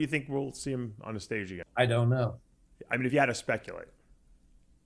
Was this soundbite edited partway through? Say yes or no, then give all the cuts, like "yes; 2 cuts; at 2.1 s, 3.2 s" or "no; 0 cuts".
yes; 1 cut; at 1.6 s